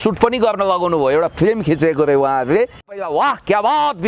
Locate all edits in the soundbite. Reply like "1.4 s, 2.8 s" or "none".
3.0 s